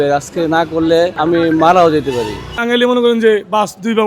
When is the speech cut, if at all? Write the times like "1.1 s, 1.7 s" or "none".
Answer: 1.1 s, 2.5 s